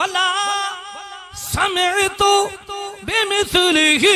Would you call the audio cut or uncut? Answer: uncut